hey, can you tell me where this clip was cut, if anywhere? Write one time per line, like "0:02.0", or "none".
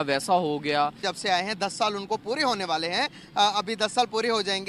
0:01.1